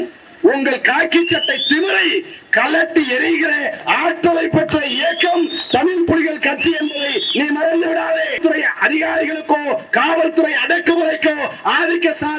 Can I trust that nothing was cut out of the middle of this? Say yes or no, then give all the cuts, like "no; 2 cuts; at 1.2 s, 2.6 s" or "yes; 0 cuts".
no; 1 cut; at 8.4 s